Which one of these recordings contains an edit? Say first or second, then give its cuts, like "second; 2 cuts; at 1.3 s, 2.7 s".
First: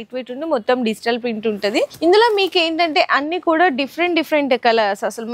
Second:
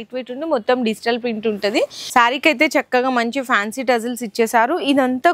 second; 1 cut; at 1.9 s